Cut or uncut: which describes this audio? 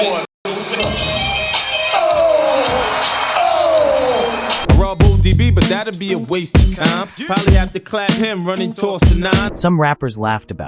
uncut